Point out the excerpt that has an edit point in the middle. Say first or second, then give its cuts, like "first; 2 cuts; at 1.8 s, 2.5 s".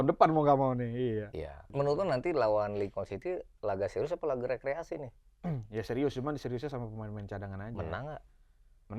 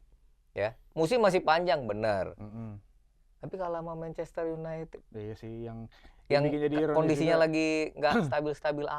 first; 1 cut; at 1.7 s